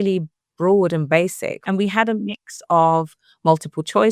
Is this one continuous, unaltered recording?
no; 1 cut; at 1.5 s

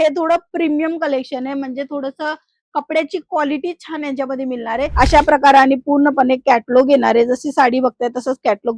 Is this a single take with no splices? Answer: no; 1 cut; at 4.8 s

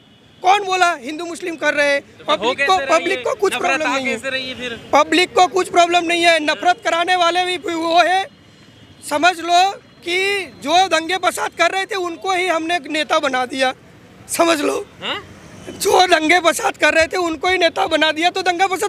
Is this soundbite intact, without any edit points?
yes; 0 cuts

